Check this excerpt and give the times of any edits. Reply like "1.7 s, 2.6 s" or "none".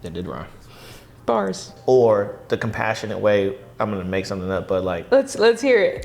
1.7 s